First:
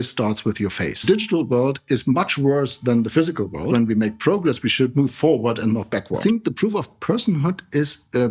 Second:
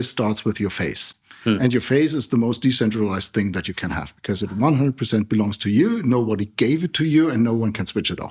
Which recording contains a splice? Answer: first; 3 cuts; at 1.0 s, 3.7 s, 6.2 s

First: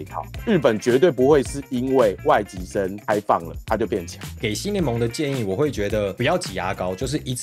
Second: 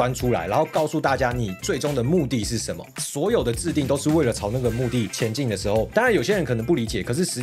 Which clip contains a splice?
first; 1 cut; at 4.3 s

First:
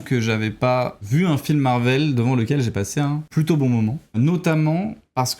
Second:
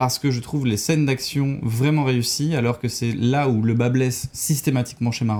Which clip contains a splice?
first; 3 cuts; at 1.0 s, 3.3 s, 4.2 s

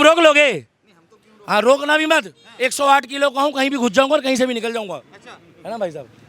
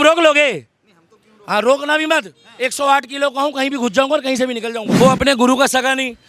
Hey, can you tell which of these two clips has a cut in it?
second; 1 cut; at 5.0 s

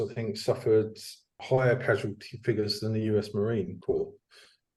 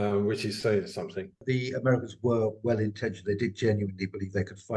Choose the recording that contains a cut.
second; 1 cut; at 1.4 s

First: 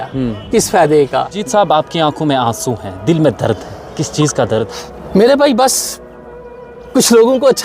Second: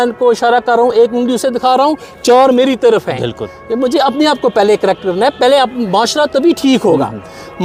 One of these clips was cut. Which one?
first; 2 cuts; at 1.4 s, 4.7 s

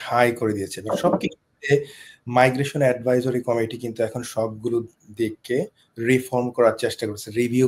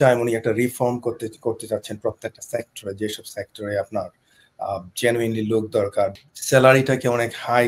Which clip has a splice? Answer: second; 1 cut; at 6.1 s

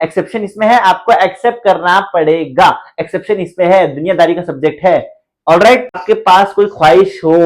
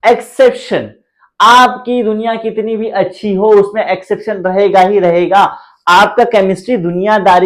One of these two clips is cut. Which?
first; 1 cut; at 6.0 s

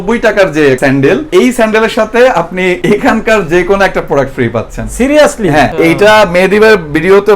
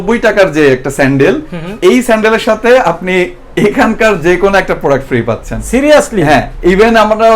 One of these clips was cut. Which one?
first; 3 cuts; at 0.9 s, 2.8 s, 5.7 s

